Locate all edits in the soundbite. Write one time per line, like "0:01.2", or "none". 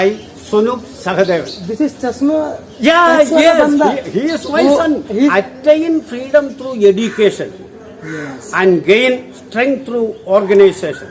0:05.3